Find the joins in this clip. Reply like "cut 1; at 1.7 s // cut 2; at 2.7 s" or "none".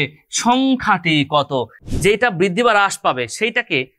cut 1; at 1.8 s